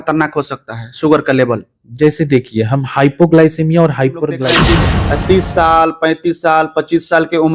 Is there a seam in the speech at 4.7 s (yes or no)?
yes